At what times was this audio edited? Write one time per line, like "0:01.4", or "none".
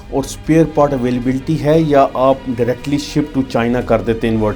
none

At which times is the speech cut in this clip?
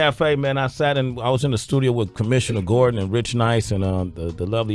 none

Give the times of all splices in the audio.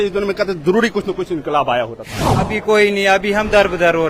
0:02.5

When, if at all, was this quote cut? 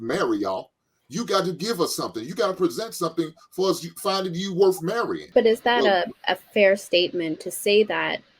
0:05.2

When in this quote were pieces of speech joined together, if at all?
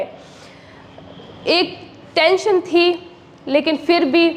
none

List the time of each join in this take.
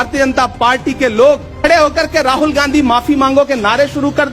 0:01.5

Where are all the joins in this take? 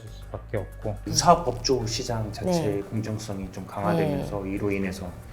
0:01.0

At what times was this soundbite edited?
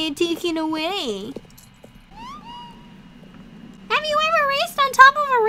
0:02.1
0:03.7

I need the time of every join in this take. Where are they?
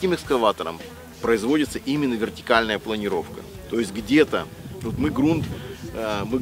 0:01.1

